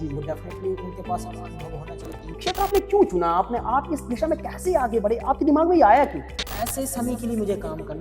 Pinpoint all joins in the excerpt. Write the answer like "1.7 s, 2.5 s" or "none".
2.4 s, 6.4 s